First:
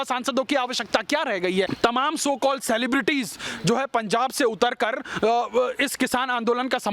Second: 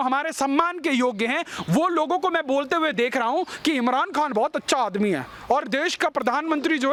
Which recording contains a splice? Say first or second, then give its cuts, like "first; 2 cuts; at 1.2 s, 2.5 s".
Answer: first; 1 cut; at 1.7 s